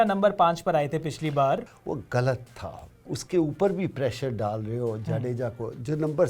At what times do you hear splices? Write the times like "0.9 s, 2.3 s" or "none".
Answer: 1.7 s